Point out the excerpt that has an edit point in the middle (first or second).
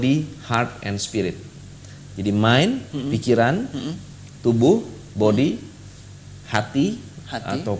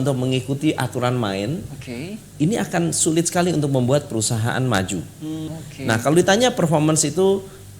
second